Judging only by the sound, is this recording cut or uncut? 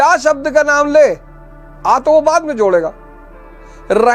uncut